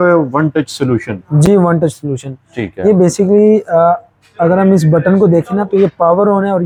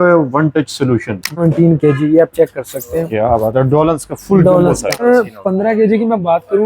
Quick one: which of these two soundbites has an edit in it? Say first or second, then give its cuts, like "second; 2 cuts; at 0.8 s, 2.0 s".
second; 2 cuts; at 1.4 s, 5.0 s